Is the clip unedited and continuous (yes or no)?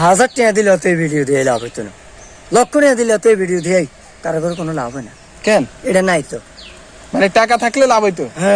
yes